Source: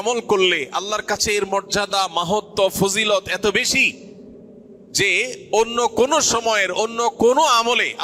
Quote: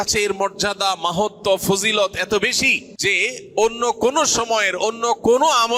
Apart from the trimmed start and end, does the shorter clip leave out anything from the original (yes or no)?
yes